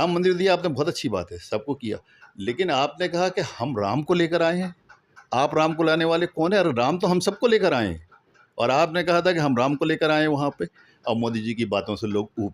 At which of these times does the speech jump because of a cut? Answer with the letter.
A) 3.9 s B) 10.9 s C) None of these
B